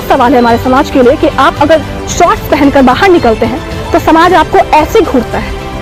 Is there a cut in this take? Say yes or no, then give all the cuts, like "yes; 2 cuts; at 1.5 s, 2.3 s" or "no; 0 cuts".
no; 0 cuts